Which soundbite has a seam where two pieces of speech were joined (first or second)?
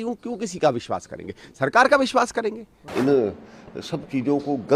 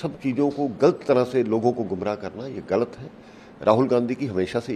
first